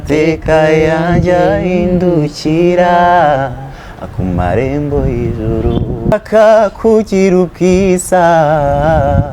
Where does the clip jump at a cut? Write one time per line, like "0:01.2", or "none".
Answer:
0:06.1